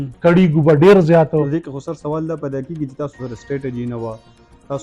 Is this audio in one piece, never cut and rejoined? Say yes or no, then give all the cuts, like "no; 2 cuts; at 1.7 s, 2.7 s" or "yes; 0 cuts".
yes; 0 cuts